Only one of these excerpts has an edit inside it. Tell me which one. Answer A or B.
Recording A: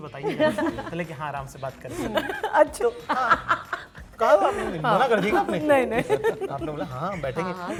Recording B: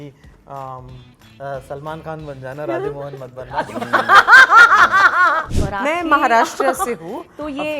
B